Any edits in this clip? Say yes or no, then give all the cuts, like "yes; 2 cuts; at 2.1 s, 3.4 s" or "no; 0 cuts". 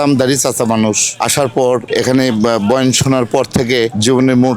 yes; 1 cut; at 1.9 s